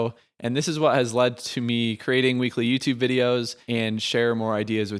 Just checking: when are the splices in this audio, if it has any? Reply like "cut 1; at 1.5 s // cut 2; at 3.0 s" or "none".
cut 1; at 3.6 s